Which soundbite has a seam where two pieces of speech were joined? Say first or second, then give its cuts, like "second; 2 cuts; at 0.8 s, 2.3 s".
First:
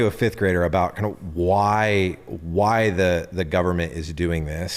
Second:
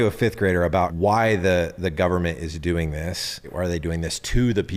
second; 2 cuts; at 0.9 s, 3.5 s